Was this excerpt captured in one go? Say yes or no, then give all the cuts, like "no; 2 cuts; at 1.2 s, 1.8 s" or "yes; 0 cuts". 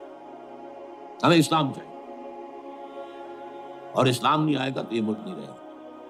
yes; 0 cuts